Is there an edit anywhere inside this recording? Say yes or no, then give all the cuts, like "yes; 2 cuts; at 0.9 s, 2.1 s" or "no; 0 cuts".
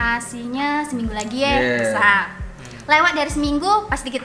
no; 0 cuts